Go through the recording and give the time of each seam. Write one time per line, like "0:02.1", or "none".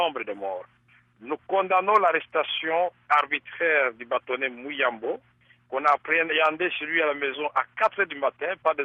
none